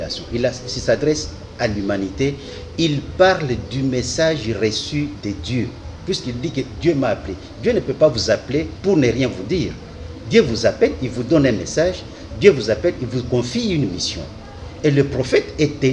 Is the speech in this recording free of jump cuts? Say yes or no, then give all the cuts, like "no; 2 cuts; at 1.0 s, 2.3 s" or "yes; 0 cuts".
yes; 0 cuts